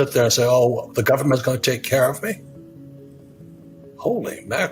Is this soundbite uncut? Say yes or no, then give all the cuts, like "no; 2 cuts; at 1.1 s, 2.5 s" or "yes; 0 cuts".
yes; 0 cuts